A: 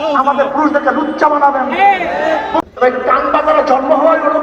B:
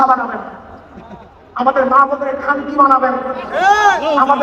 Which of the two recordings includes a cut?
A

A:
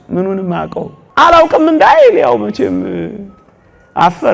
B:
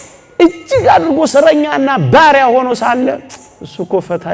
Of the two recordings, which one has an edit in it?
A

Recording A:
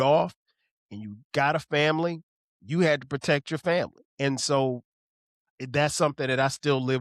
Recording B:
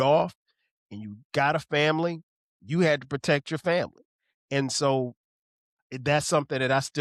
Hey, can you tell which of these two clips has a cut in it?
A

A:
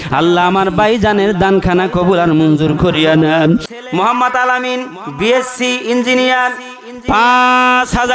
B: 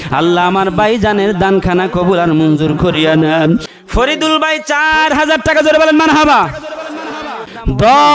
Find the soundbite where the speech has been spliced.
A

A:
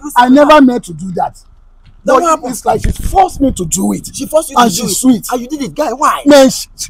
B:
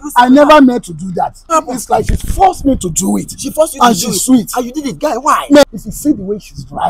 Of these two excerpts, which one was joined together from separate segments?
B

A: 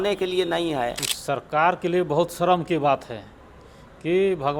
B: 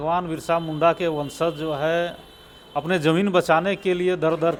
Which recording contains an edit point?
A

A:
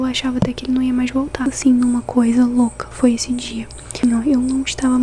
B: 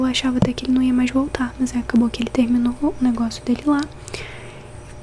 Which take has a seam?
A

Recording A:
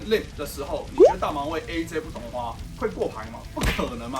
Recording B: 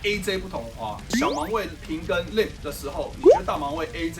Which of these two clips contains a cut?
B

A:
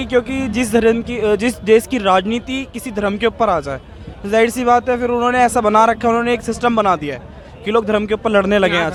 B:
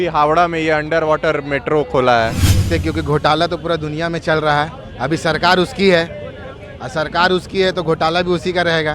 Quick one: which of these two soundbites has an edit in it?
B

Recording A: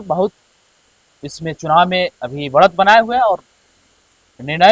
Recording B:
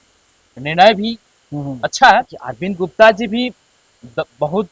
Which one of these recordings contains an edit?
B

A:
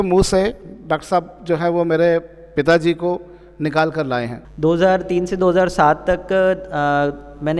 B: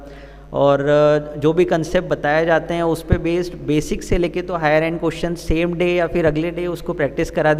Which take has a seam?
A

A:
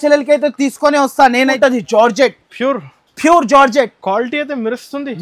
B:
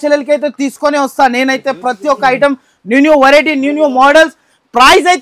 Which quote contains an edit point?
A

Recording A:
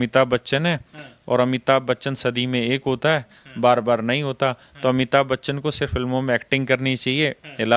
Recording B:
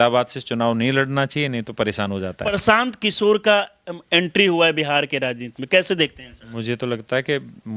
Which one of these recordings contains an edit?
B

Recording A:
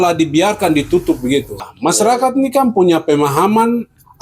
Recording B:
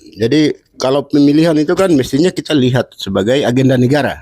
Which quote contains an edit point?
A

